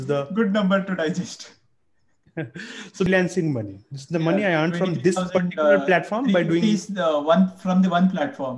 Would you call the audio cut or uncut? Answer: cut